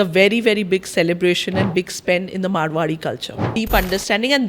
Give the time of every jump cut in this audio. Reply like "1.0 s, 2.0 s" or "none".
3.5 s